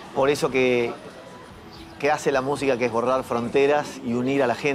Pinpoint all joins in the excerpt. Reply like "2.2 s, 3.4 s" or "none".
none